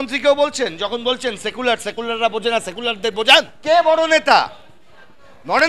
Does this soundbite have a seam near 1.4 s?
no; 1 cut; at 3.1 s

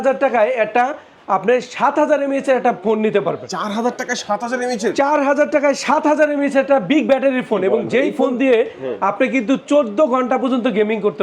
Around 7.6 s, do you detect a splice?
no; 0 cuts

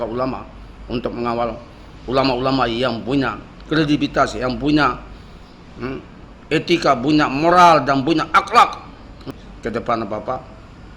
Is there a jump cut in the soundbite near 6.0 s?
no; 1 cut; at 9.3 s

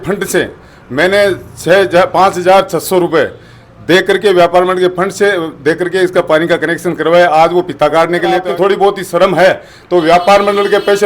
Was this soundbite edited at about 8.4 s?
yes; 1 cut; at 8.4 s

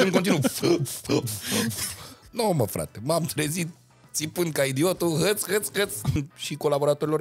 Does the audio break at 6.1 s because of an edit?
yes; 2 cuts; at 2.1 s, 6.1 s

